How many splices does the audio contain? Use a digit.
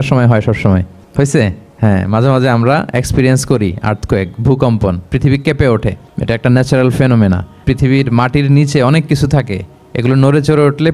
4